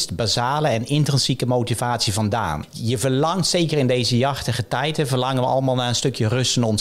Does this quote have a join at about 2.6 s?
yes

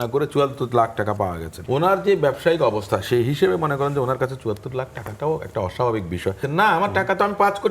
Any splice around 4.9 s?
no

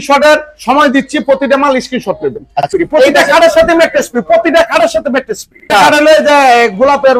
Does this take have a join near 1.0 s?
no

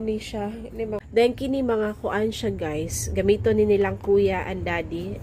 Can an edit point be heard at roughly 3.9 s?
no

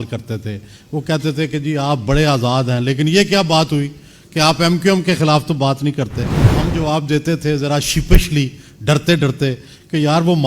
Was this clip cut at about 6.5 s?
yes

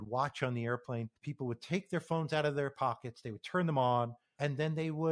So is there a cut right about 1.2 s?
yes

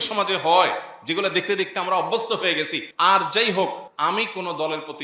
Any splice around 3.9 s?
yes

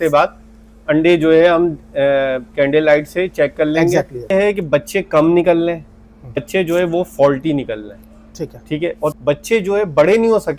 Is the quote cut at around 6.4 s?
yes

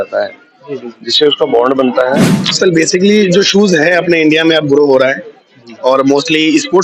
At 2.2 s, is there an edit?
yes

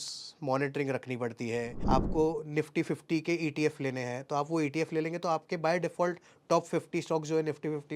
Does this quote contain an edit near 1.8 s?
yes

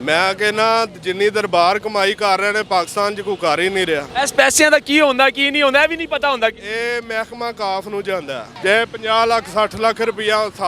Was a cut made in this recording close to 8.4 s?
yes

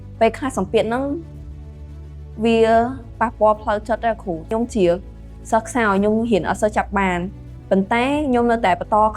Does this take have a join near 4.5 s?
yes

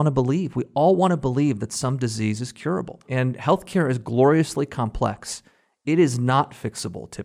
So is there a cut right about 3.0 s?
yes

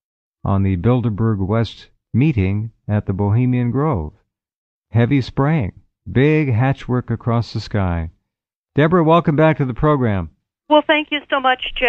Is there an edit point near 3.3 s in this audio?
yes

